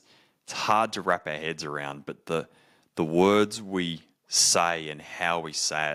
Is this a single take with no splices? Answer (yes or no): yes